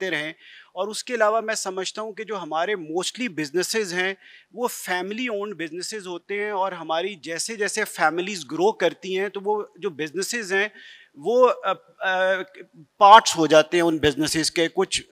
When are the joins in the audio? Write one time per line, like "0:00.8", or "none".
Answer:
none